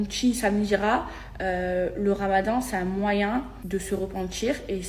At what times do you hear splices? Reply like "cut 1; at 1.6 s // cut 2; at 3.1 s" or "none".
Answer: cut 1; at 3.6 s